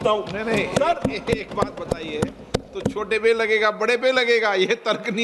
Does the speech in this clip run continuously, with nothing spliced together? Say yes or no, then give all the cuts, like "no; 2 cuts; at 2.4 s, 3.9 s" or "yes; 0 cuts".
yes; 0 cuts